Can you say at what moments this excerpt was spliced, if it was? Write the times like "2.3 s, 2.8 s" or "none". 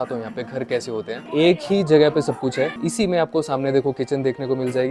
1.2 s, 2.8 s